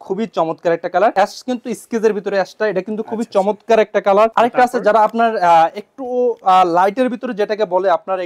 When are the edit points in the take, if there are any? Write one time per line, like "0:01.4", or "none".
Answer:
0:01.1
0:04.3